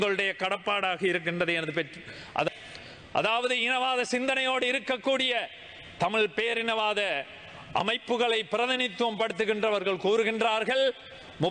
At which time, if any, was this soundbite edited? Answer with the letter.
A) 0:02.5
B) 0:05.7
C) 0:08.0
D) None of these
A